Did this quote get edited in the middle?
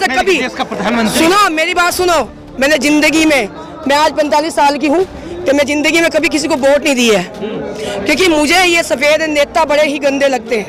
no; 0 cuts

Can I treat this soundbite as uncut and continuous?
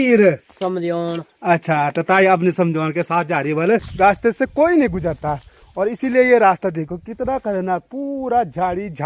no; 1 cut; at 3.9 s

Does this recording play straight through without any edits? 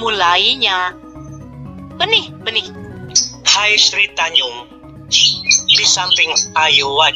no; 1 cut; at 2.7 s

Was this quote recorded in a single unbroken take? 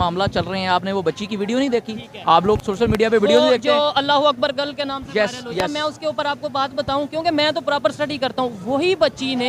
yes; 0 cuts

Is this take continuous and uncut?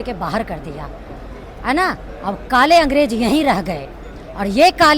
yes; 0 cuts

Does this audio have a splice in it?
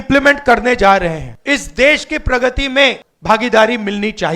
yes; 2 cuts; at 1.3 s, 3.1 s

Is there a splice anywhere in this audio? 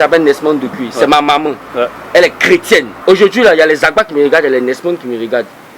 yes; 1 cut; at 2.9 s

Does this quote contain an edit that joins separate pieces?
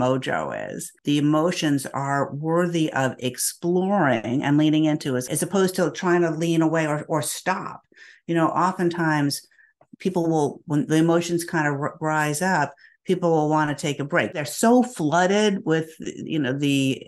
yes; 3 cuts; at 1.0 s, 5.2 s, 14.4 s

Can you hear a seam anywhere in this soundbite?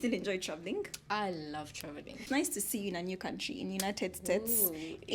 yes; 1 cut; at 2.2 s

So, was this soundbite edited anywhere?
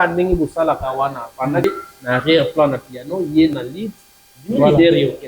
yes; 1 cut; at 1.6 s

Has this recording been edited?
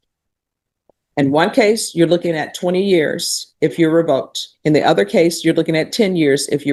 no; 0 cuts

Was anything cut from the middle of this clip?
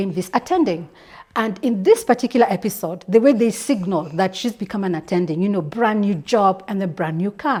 no; 0 cuts

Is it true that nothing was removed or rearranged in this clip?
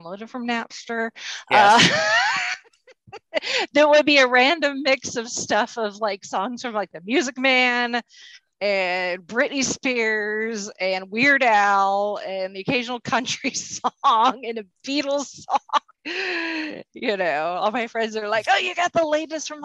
no; 1 cut; at 16.0 s

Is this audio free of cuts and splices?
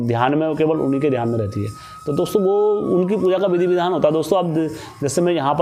yes; 0 cuts

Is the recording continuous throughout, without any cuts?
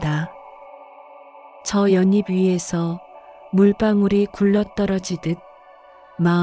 yes; 0 cuts

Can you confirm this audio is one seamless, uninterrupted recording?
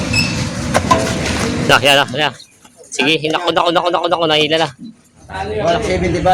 no; 1 cut; at 5.4 s

